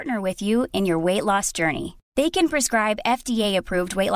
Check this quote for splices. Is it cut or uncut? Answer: uncut